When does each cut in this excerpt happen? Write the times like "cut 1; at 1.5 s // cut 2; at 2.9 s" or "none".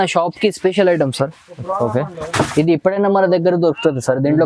none